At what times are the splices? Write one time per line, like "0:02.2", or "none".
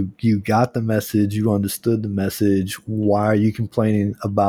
none

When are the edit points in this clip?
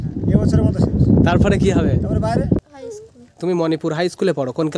0:02.6

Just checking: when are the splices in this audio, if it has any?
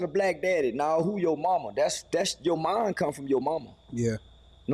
none

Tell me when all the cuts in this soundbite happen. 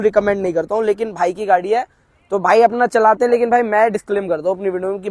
none

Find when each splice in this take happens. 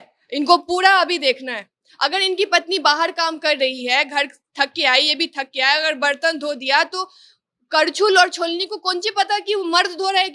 none

